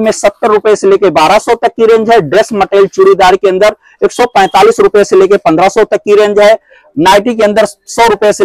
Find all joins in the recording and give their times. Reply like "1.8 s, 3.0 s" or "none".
none